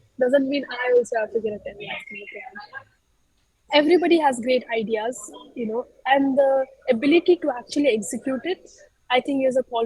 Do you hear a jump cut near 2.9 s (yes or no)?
yes